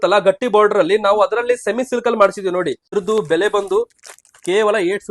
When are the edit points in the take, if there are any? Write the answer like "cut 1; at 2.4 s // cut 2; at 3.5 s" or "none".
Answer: cut 1; at 2.8 s